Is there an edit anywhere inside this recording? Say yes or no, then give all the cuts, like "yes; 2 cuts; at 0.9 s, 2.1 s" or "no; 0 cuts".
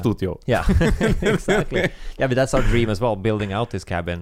no; 0 cuts